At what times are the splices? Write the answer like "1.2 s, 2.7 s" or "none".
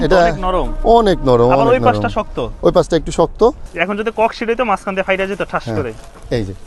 3.7 s

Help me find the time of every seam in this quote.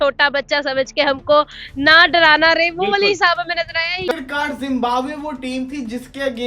4.0 s

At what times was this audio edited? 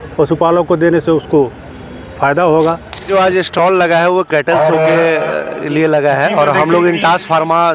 3.1 s

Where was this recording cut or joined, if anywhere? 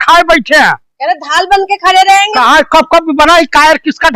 0.9 s, 2.3 s

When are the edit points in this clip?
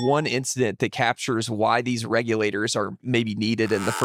none

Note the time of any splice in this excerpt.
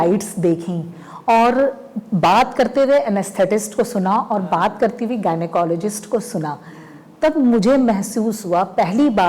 none

